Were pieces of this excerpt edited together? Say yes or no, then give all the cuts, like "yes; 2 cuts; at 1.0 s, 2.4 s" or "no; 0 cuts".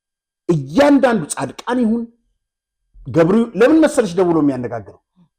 no; 0 cuts